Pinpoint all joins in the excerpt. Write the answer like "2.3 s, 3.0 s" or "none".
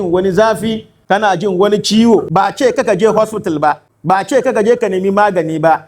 0.9 s, 2.3 s, 3.9 s